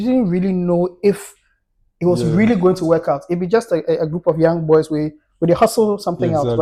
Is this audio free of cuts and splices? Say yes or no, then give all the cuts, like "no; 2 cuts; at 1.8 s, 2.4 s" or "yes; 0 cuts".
yes; 0 cuts